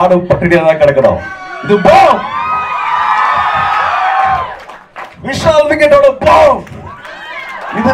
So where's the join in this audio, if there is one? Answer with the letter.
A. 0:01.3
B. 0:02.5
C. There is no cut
C